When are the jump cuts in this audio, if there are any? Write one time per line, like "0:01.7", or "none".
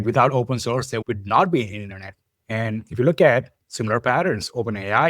0:01.0

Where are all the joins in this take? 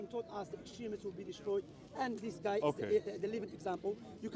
none

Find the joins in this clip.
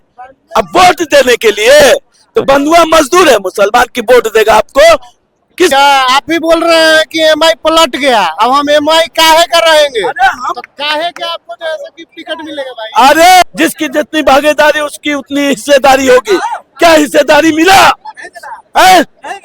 0:05.7
0:13.4

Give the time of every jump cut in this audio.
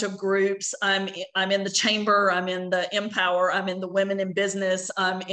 none

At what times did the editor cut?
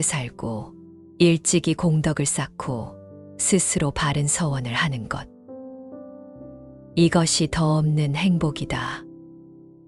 none

